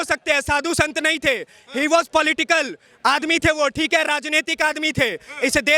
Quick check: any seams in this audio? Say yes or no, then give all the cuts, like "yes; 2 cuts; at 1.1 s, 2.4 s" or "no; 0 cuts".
no; 0 cuts